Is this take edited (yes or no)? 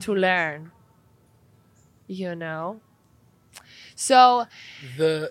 no